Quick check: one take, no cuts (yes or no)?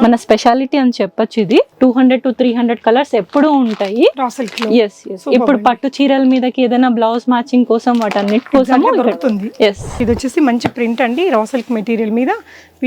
no